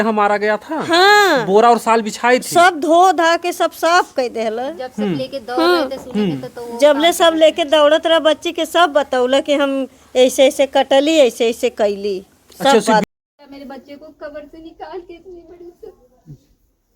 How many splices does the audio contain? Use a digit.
1